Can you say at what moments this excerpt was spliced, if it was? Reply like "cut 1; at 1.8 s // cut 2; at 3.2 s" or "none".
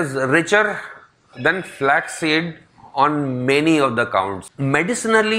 cut 1; at 4.4 s